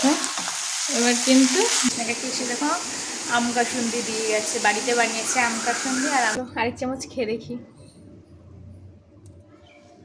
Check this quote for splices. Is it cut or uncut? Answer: cut